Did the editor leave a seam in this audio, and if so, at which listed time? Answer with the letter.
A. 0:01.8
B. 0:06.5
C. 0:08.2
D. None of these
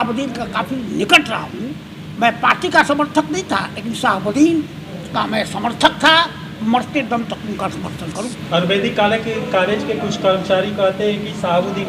C